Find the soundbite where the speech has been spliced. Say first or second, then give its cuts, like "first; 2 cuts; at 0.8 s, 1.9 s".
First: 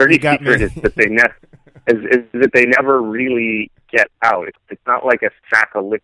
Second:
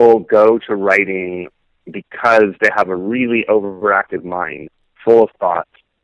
first; 1 cut; at 4.6 s